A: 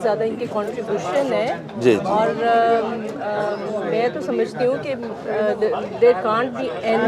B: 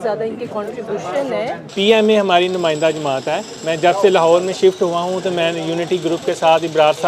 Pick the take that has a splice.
B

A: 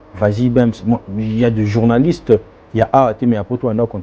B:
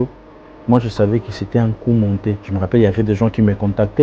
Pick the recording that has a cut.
B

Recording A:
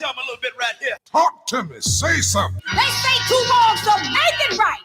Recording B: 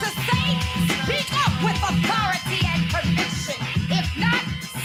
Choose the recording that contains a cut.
A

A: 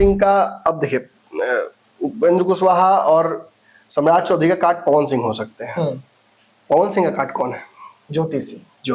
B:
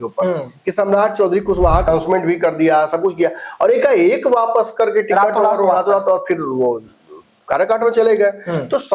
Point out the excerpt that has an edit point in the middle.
B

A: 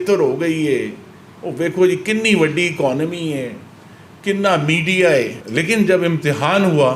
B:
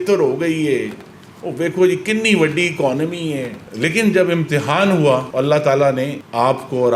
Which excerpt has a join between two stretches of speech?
B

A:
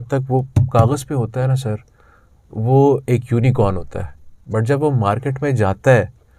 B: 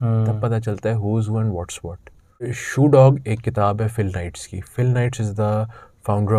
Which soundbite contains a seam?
B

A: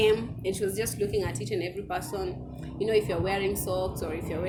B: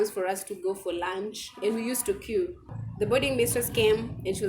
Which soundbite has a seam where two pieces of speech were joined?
B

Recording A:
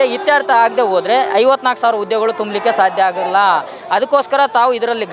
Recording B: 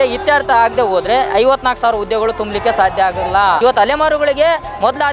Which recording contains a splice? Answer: B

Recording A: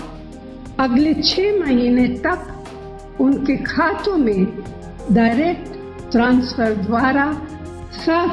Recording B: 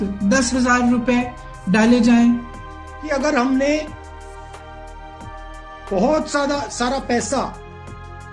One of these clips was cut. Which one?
B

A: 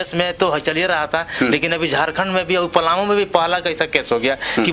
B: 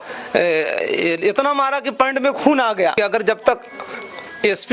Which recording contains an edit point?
B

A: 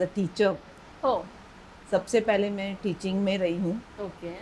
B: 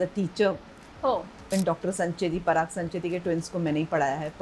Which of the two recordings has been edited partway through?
B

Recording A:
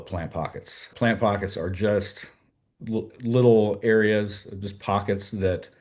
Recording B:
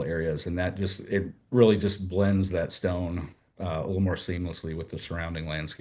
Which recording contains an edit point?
A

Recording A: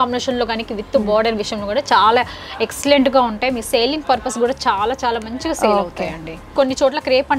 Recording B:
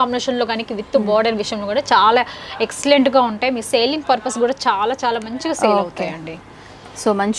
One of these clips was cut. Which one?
A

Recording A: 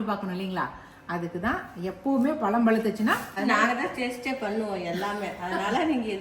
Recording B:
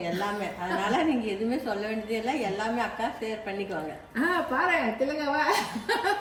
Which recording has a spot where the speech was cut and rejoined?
A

